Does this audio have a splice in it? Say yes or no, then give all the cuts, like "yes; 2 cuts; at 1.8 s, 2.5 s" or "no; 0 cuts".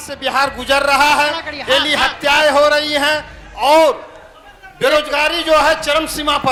no; 0 cuts